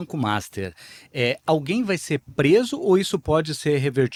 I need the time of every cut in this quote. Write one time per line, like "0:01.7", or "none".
none